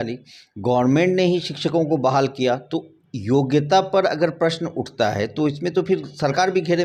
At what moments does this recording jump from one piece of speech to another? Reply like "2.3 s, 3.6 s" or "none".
none